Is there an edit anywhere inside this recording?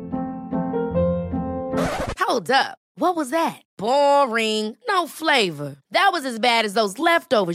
no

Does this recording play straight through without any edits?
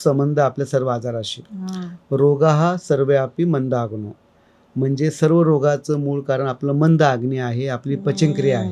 yes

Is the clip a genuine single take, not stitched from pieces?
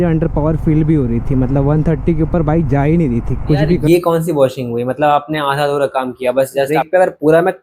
no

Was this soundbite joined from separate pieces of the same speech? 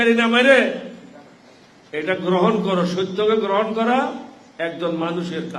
no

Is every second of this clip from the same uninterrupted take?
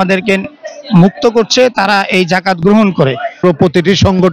no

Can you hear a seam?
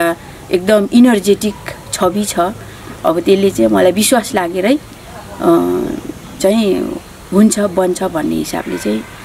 no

